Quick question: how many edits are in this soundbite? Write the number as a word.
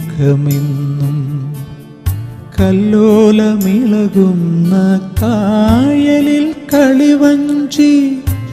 zero